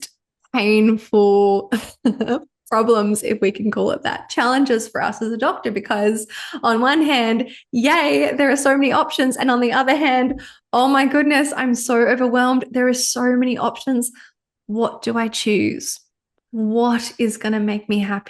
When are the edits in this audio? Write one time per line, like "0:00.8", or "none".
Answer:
none